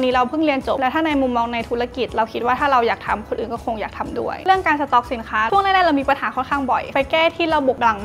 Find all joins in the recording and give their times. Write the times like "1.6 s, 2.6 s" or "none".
0.8 s, 4.4 s, 6.9 s